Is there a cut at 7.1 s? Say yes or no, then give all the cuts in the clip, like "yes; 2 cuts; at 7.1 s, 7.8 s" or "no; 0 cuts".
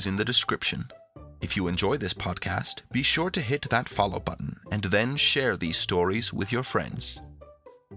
yes; 1 cut; at 7.1 s